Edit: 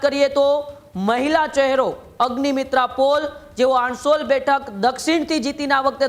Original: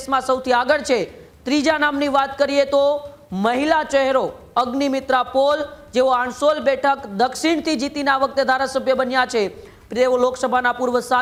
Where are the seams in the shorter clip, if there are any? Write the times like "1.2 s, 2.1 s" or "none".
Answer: none